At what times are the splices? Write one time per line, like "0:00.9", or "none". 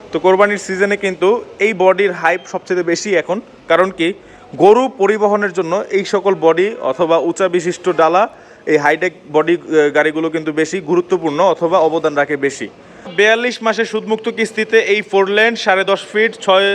0:13.1